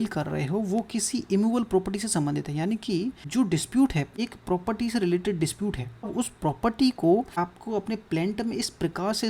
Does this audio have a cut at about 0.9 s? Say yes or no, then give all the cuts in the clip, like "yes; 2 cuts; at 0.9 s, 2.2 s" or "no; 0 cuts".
no; 4 cuts; at 3.2 s, 4.1 s, 6.1 s, 7.3 s